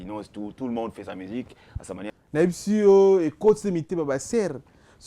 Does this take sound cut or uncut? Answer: cut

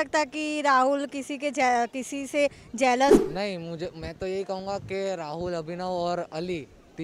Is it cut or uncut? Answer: cut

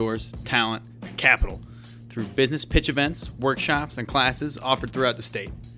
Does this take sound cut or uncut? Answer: uncut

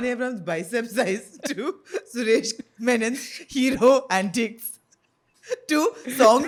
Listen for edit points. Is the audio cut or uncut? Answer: uncut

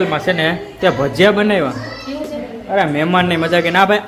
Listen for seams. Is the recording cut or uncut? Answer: uncut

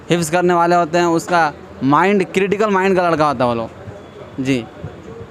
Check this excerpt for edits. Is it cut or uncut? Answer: uncut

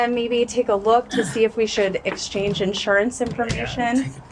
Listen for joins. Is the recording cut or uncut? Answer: uncut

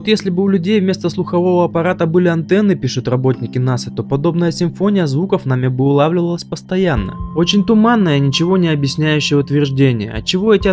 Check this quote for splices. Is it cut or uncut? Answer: uncut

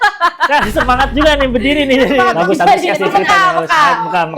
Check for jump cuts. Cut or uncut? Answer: cut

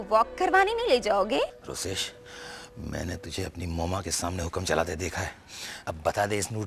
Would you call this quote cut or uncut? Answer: cut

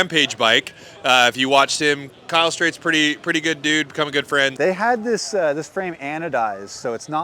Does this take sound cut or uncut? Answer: cut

